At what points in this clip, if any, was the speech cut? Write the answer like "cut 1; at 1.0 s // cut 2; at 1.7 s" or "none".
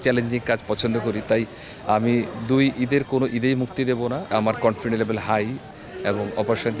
cut 1; at 4.3 s // cut 2; at 5.7 s